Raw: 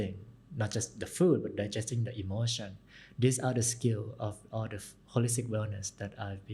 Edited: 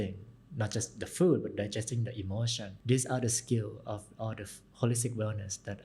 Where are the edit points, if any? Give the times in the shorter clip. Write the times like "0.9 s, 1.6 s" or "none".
2.7 s